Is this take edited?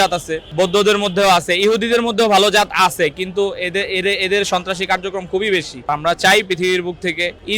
yes; 1 cut; at 5.9 s

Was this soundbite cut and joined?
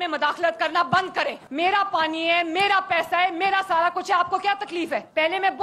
no; 0 cuts

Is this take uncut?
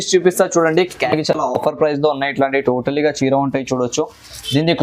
no; 1 cut; at 1.0 s

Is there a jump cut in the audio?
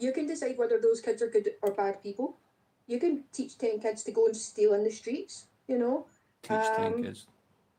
no; 0 cuts

